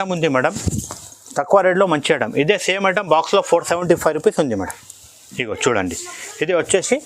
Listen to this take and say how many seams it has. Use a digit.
0